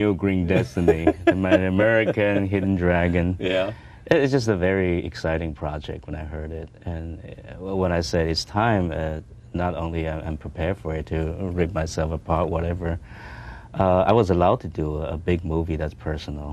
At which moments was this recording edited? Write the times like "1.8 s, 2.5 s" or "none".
12.8 s